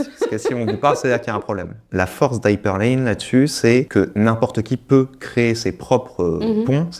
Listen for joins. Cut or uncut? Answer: cut